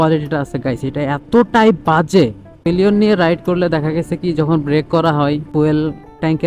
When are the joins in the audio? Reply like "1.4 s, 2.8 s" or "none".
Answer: 2.5 s, 5.5 s